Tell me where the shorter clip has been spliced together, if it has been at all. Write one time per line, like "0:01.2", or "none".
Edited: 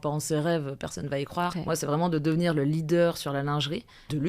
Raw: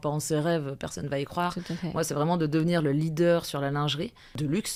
0:01.5